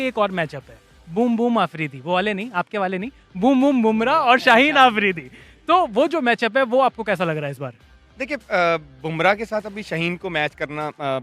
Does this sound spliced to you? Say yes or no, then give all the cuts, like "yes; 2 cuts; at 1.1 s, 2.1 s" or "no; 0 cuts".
no; 0 cuts